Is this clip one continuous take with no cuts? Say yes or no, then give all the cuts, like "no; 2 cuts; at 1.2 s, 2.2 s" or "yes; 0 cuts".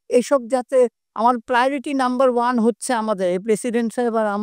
yes; 0 cuts